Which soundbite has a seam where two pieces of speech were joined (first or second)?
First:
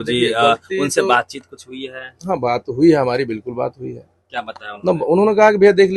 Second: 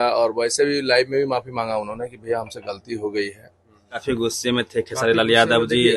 second